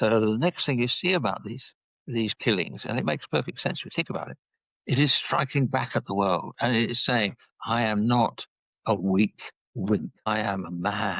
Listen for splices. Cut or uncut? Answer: cut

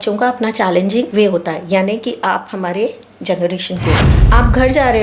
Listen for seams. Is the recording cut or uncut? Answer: cut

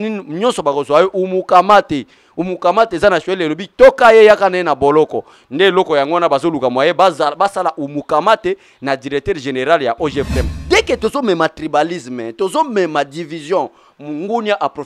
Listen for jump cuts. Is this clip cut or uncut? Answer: cut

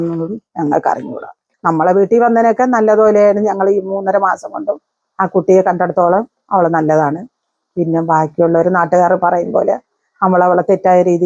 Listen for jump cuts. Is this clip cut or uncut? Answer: cut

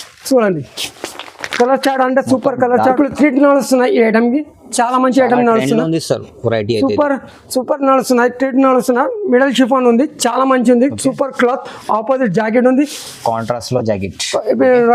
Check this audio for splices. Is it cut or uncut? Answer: cut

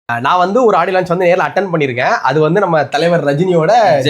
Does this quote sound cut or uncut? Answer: uncut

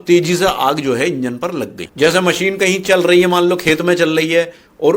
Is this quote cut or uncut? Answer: cut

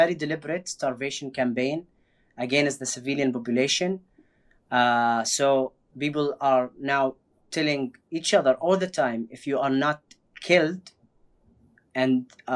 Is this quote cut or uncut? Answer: uncut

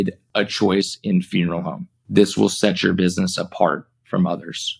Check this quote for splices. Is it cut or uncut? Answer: uncut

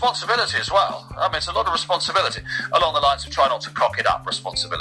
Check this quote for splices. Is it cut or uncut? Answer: uncut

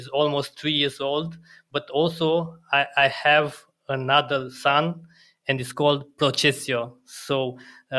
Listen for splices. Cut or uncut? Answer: uncut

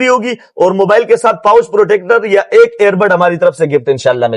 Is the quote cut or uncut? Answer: uncut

